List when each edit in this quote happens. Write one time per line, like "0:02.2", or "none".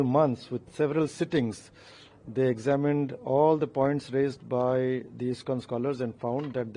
none